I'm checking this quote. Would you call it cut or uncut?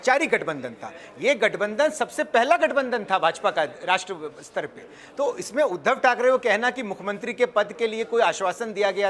uncut